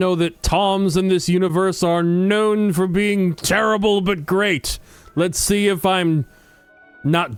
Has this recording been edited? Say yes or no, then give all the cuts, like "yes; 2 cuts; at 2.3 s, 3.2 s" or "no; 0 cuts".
no; 0 cuts